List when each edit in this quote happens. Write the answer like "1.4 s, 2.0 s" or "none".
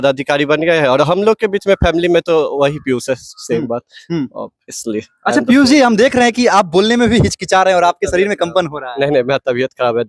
none